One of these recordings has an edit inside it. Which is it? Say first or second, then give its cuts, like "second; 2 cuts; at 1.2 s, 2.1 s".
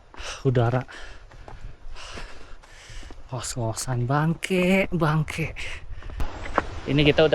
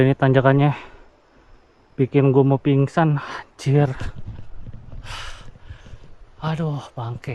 first; 1 cut; at 6.4 s